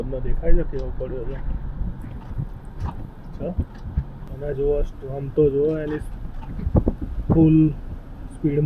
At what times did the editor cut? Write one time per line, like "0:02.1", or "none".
none